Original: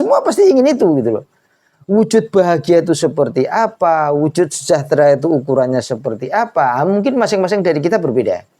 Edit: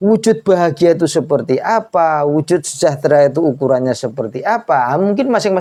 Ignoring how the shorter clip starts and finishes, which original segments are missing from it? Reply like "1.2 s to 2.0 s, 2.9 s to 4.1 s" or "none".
none